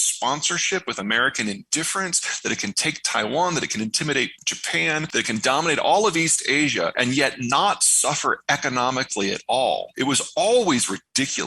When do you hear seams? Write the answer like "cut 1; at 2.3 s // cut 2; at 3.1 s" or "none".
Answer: cut 1; at 4.9 s // cut 2; at 6.9 s // cut 3; at 9.9 s